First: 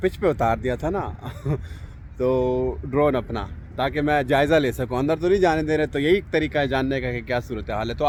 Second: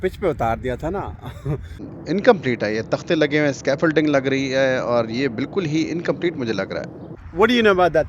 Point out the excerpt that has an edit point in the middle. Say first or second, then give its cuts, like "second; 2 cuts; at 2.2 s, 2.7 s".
second; 2 cuts; at 1.9 s, 7.0 s